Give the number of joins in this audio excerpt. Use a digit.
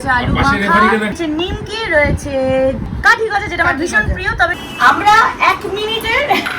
3